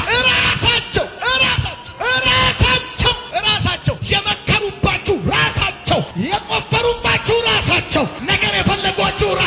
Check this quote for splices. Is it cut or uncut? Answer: uncut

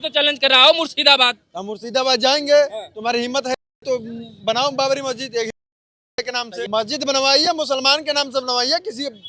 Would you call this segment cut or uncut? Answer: cut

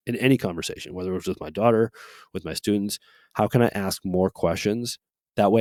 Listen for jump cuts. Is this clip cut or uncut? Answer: uncut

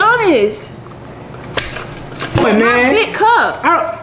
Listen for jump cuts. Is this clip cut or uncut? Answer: cut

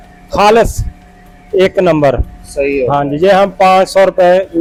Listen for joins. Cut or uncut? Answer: uncut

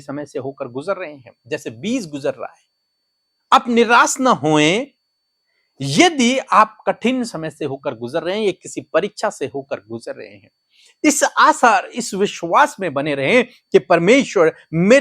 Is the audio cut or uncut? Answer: uncut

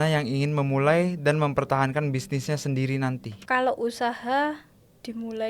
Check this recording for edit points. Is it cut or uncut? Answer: cut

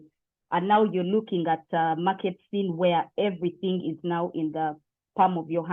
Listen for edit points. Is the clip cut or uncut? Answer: uncut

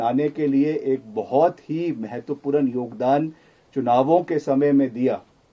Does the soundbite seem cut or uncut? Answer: uncut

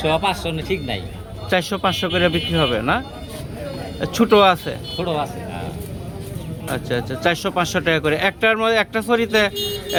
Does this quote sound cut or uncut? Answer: uncut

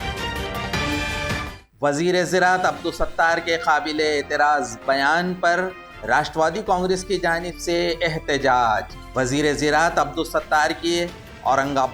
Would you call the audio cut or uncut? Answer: cut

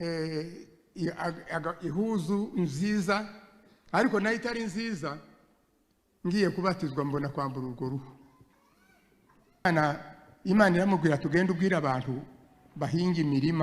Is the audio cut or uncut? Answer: cut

